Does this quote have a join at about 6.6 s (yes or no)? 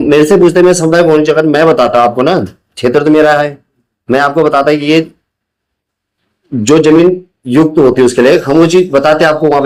no